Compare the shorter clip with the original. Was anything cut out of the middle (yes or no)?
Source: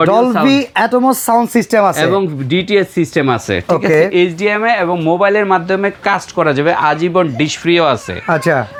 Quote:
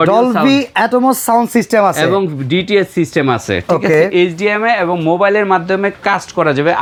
no